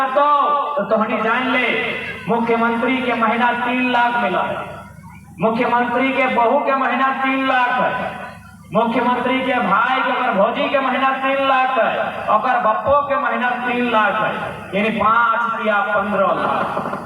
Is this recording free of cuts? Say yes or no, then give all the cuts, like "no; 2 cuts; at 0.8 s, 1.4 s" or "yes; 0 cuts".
yes; 0 cuts